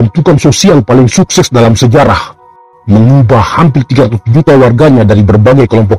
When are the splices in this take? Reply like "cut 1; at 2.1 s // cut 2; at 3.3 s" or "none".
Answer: none